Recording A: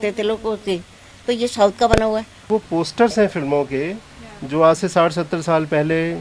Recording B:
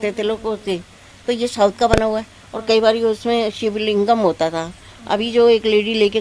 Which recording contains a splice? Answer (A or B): A